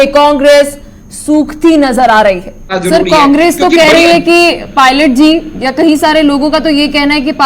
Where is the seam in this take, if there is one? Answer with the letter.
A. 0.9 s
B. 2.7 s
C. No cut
B